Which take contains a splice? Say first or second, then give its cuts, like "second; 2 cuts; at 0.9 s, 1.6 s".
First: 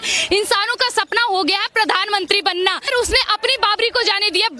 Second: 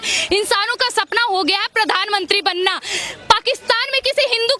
first; 1 cut; at 2.9 s